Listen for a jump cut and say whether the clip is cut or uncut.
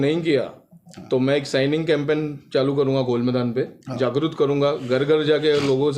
uncut